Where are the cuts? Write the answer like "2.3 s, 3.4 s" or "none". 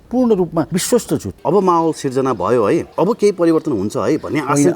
0.9 s, 2.9 s